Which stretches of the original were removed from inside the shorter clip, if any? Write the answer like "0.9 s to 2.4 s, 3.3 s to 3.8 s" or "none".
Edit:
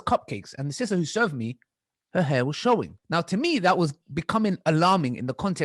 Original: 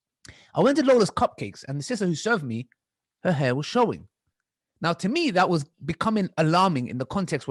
4.1 s to 4.7 s